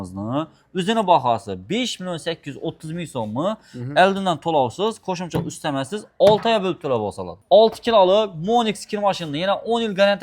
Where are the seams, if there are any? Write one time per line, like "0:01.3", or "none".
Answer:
0:07.3